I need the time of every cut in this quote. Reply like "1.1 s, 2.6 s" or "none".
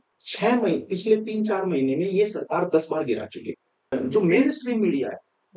3.9 s